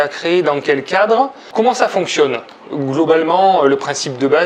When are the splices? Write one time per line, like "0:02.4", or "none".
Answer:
0:01.4

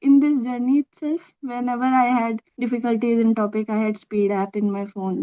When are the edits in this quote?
0:02.5

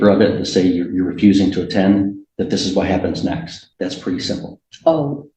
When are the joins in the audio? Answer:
0:03.6

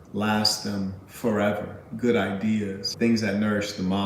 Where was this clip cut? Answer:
0:02.8

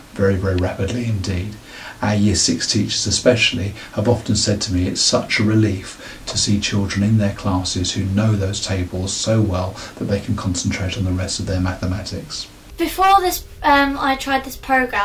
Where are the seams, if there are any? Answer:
none

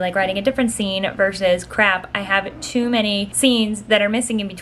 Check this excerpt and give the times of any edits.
0:03.3

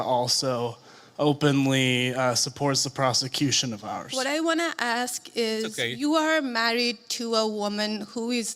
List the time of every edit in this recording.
0:04.1

